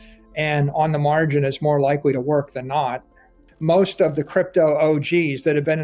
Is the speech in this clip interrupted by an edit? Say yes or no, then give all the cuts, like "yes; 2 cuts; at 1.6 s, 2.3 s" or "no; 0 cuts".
yes; 1 cut; at 3.5 s